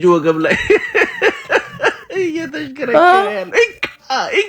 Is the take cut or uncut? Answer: uncut